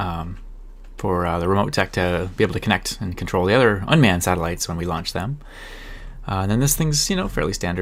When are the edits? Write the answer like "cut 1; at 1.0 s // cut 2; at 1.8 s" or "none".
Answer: none